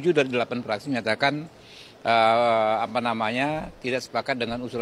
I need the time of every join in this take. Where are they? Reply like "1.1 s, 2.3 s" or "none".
none